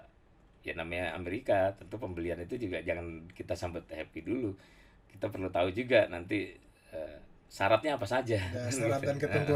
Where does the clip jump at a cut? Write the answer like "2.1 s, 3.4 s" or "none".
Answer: none

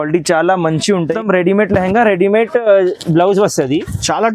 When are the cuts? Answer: 1.2 s

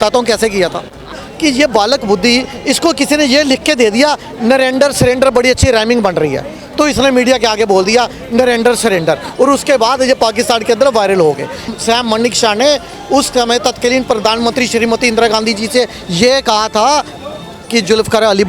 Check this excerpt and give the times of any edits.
1.2 s, 11.7 s

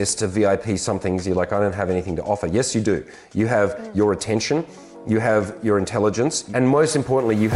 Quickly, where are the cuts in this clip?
6.4 s

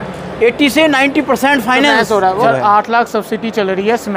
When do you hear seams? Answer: 2.4 s

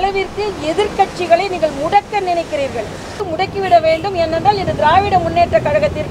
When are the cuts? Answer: 3.3 s

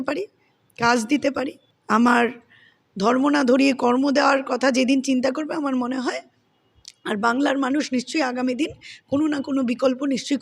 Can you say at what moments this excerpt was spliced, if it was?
1.7 s

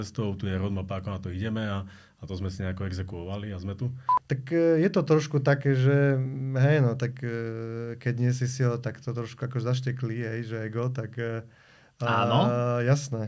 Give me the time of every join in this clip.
4.1 s

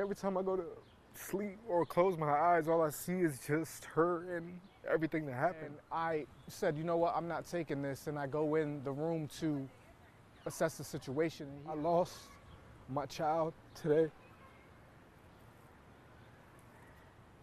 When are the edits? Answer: 5.8 s, 11.5 s

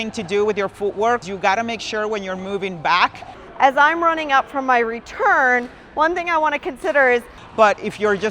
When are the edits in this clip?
1.2 s, 3.4 s, 7.4 s

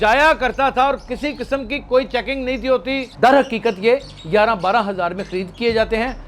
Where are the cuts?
3.1 s

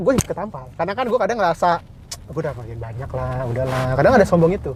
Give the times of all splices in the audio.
none

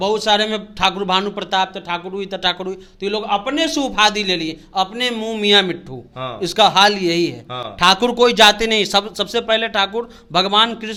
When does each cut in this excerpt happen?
none

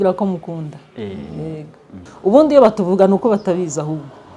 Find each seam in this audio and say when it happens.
2.0 s

